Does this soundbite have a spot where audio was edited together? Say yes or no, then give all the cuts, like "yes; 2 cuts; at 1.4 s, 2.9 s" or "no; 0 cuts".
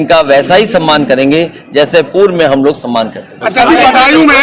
no; 0 cuts